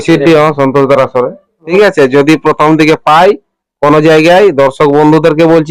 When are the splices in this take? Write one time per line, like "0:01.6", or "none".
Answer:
0:01.7